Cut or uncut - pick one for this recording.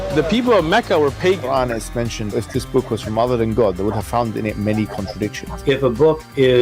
cut